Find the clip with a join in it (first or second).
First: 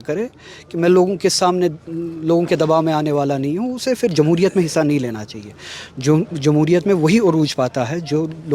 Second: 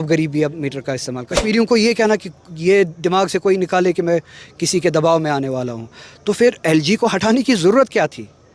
second